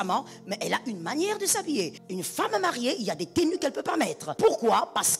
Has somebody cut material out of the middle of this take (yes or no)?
yes